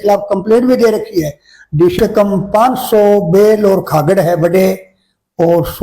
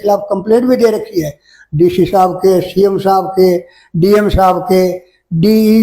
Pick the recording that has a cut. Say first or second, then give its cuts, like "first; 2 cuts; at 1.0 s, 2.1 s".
first; 1 cut; at 1.9 s